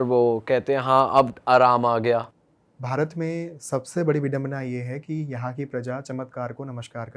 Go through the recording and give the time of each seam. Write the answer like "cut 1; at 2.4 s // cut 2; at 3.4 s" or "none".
cut 1; at 2.4 s